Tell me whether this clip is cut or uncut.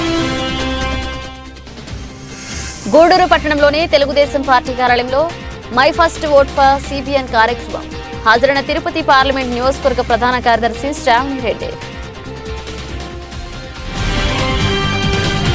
cut